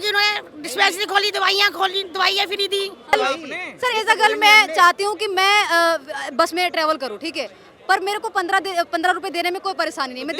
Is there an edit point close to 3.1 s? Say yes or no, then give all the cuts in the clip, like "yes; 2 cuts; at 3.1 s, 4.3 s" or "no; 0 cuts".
yes; 1 cut; at 3.1 s